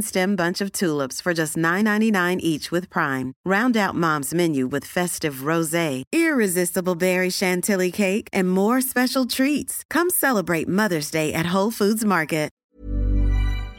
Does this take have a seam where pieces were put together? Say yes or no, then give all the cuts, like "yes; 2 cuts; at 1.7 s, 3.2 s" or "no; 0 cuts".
yes; 1 cut; at 12.6 s